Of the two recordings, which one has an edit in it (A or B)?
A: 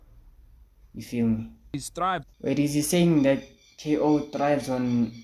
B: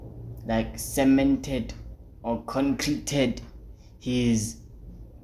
A